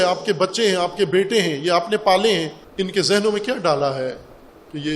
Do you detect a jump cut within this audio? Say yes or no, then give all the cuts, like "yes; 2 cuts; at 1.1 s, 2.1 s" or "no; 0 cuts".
yes; 1 cut; at 2.6 s